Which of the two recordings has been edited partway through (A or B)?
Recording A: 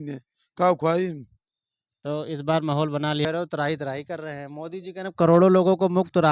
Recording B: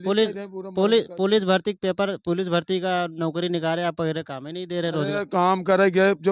A